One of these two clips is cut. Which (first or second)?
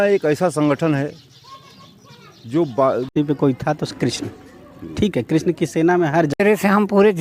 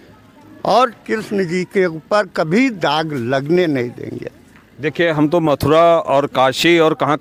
first